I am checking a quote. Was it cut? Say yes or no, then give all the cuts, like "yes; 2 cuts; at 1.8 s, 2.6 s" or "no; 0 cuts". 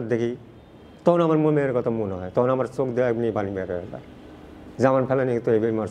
no; 0 cuts